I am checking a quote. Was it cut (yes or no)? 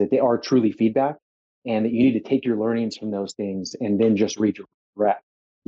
no